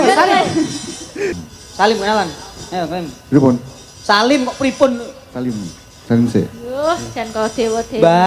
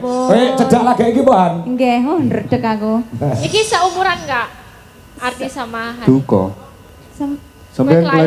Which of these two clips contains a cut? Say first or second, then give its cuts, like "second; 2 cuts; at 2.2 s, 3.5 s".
first; 1 cut; at 1.3 s